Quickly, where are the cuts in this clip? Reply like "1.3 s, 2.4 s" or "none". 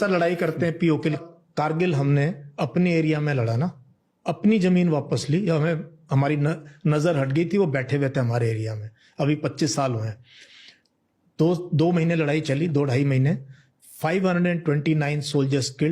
1.3 s